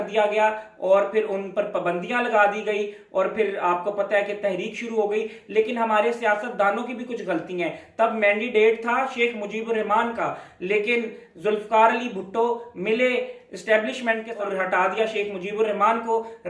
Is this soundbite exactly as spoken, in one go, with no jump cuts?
no; 1 cut; at 14.3 s

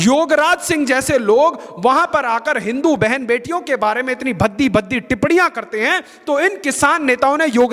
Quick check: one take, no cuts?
yes; 0 cuts

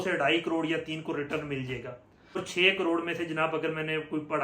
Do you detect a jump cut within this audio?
yes; 1 cut; at 2.4 s

